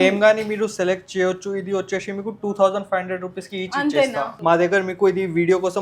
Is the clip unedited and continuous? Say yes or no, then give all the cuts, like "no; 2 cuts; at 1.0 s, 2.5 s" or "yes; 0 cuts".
no; 1 cut; at 4.3 s